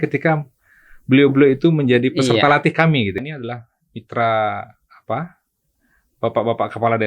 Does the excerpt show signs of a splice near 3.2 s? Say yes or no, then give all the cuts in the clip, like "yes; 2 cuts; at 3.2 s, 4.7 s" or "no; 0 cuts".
yes; 1 cut; at 3.2 s